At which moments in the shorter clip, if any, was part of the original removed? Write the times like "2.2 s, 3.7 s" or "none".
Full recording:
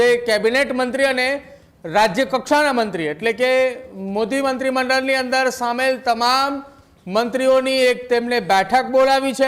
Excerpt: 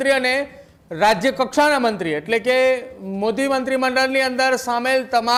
none